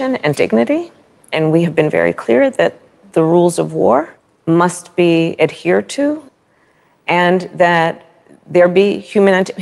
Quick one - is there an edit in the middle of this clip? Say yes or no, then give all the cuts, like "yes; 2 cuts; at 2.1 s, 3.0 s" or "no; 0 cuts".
yes; 1 cut; at 1.6 s